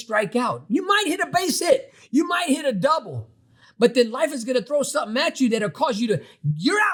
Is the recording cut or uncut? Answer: uncut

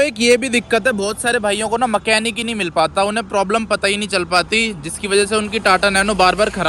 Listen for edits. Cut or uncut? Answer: uncut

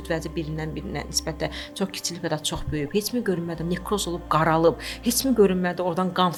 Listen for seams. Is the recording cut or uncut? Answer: uncut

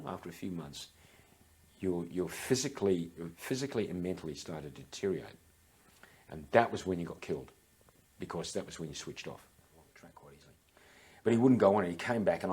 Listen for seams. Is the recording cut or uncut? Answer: cut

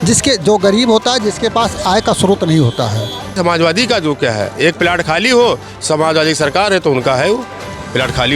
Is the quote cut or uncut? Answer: cut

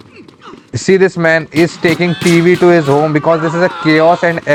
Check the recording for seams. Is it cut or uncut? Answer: uncut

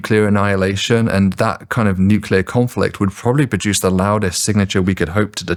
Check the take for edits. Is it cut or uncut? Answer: uncut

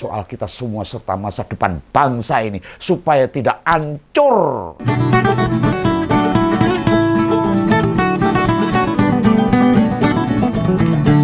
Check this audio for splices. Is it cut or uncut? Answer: cut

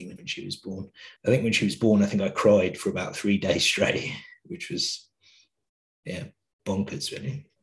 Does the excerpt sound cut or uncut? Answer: uncut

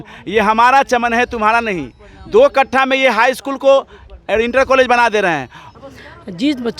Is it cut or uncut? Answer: cut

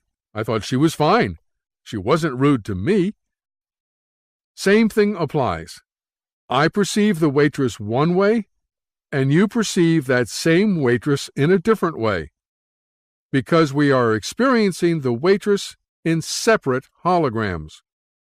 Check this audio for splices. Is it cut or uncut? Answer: cut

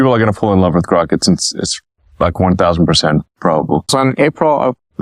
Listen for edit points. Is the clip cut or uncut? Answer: cut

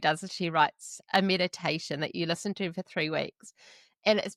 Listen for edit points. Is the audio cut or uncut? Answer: uncut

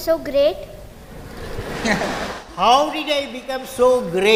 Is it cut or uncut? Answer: uncut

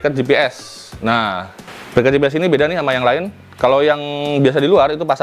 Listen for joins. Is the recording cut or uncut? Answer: uncut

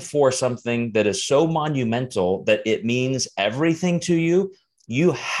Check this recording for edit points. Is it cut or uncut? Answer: uncut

